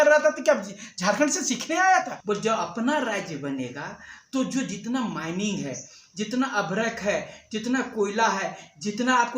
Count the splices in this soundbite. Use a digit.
1